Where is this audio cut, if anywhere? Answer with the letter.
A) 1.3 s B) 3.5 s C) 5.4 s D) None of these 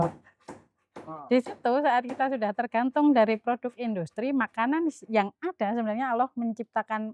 D